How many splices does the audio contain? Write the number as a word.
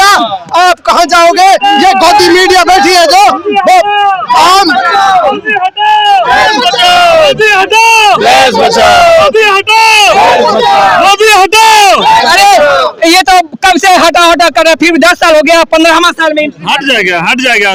zero